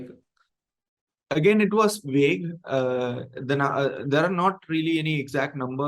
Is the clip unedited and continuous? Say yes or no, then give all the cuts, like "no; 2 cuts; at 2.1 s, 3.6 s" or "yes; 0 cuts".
yes; 0 cuts